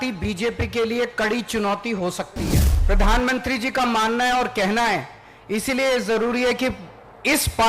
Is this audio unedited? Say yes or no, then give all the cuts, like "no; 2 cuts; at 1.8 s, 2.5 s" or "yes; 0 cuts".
no; 1 cut; at 2.7 s